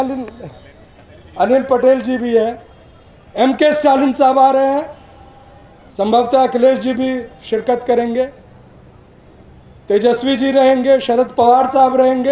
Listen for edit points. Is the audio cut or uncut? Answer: uncut